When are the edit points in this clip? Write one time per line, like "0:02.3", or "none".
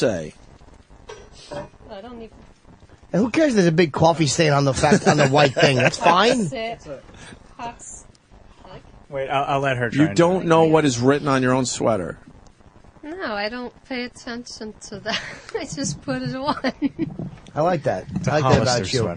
0:17.9